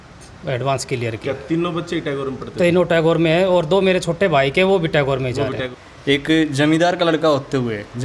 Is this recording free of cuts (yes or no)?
no